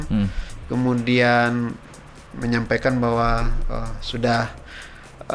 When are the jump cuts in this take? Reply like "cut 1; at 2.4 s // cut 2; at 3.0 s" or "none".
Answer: none